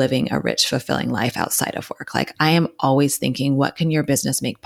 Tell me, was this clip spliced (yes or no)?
no